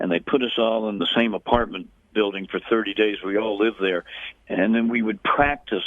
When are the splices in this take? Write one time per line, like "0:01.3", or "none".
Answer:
0:01.0
0:04.4